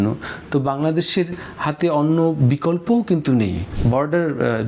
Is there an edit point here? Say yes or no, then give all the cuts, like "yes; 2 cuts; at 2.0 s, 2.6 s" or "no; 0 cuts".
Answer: yes; 1 cut; at 3.7 s